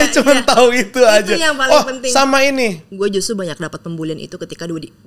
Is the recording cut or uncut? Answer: cut